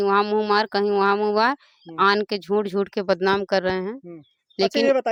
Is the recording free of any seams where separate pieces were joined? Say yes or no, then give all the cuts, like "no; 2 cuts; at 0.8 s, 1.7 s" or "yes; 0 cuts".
yes; 0 cuts